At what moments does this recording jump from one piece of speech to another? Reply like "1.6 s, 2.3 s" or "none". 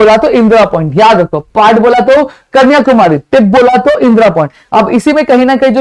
none